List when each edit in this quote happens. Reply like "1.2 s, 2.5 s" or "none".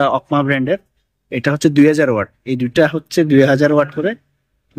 none